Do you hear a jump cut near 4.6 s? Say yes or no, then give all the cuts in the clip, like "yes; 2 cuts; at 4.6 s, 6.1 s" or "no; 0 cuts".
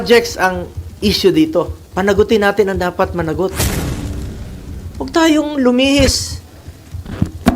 no; 1 cut; at 1.8 s